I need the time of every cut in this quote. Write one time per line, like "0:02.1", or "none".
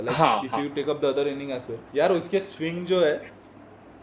0:01.8